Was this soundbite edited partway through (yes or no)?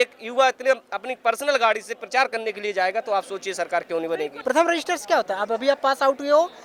yes